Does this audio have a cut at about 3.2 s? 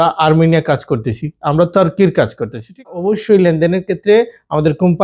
yes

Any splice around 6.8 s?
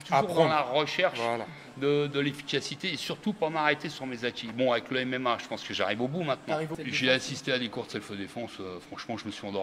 yes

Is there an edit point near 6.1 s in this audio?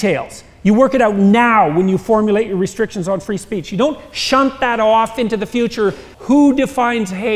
yes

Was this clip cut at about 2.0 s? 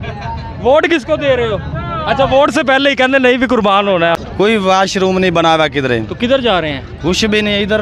no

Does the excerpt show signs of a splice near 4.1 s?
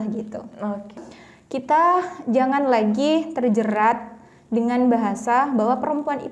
no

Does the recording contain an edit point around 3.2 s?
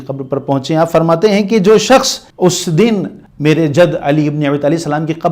yes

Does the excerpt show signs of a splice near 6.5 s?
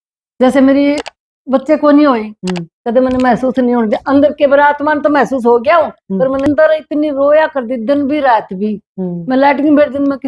yes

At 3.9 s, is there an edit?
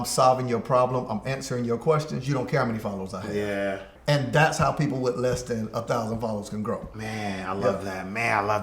yes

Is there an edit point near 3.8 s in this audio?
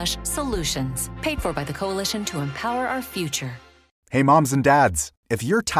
yes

